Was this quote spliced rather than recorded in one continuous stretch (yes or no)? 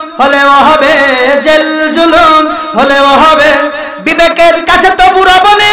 no